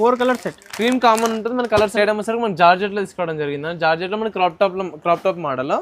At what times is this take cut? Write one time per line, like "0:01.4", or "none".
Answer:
0:01.9